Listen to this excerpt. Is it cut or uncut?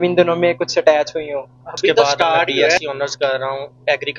cut